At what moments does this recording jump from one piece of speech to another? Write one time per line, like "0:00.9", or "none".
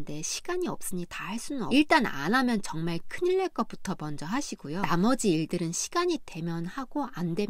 0:01.7
0:04.8